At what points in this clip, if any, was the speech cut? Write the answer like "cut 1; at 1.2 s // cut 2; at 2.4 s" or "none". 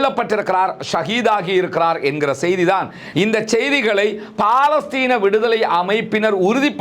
cut 1; at 3.0 s